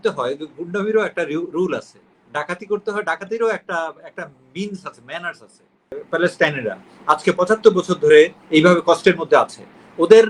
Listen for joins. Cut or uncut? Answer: cut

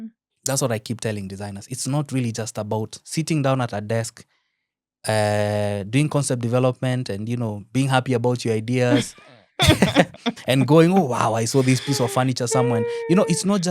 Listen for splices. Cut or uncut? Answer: uncut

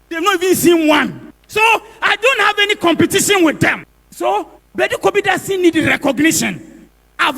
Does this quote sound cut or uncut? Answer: cut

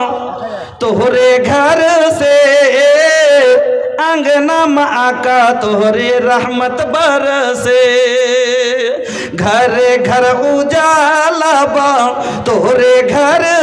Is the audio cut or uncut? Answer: uncut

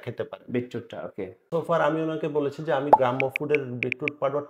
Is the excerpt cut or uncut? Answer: cut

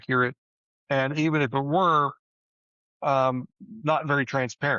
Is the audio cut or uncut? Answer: uncut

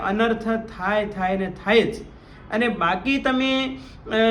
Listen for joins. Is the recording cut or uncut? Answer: uncut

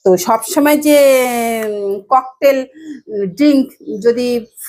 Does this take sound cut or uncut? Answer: uncut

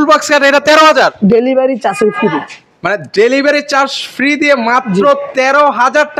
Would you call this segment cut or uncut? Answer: uncut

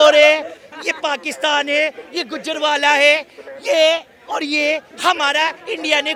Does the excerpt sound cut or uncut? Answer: uncut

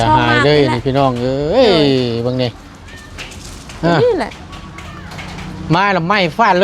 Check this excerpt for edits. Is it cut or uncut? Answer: uncut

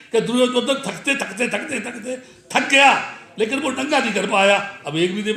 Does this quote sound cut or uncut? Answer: uncut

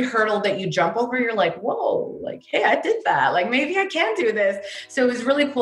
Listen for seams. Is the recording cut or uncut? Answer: uncut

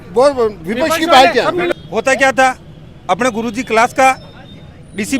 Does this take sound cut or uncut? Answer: cut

